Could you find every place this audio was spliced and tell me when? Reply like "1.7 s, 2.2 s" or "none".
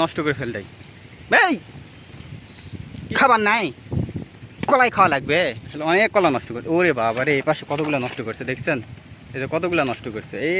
2.9 s, 5.7 s